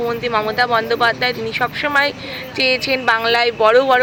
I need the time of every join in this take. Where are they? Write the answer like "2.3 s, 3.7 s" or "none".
none